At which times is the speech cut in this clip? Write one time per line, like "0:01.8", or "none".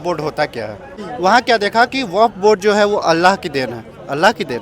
0:01.0